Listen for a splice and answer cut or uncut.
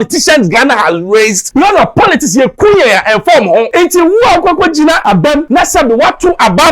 cut